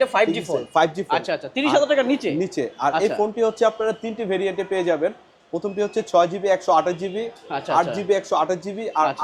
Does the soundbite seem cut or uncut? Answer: uncut